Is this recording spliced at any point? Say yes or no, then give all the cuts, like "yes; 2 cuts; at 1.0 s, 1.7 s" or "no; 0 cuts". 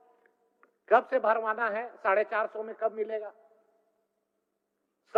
no; 0 cuts